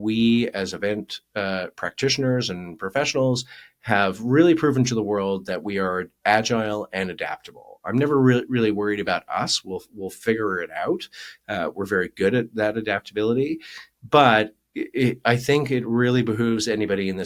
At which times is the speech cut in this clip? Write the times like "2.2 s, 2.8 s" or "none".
none